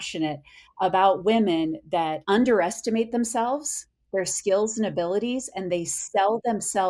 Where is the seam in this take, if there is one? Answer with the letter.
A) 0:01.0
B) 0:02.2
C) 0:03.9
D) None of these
B